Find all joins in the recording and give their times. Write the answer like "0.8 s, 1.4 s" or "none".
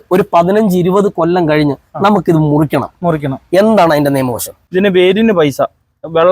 4.5 s